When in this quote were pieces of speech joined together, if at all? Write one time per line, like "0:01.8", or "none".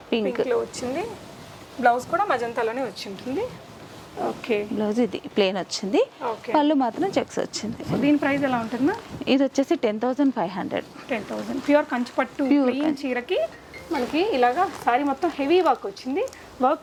none